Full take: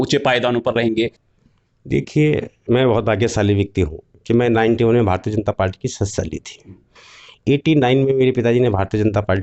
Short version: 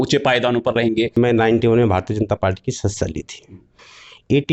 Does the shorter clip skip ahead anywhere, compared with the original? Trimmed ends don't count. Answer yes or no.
yes